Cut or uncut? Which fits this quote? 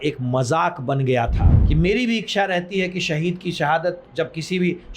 cut